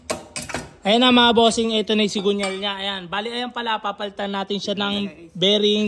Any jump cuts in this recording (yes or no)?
no